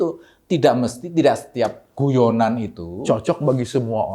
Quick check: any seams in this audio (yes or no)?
no